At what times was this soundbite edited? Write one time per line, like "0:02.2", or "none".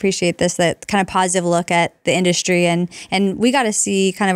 none